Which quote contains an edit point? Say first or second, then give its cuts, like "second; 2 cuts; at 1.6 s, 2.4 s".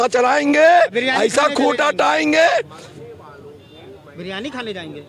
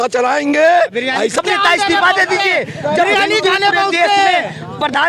second; 1 cut; at 1.4 s